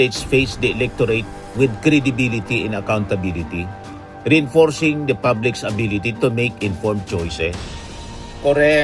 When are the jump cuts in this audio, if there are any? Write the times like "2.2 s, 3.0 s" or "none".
none